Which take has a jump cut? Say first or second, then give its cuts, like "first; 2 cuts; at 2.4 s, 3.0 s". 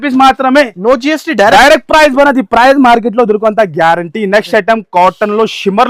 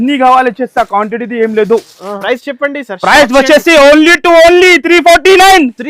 second; 1 cut; at 2.2 s